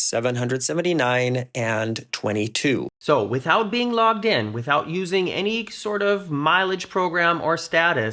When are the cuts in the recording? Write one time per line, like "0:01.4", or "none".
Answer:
none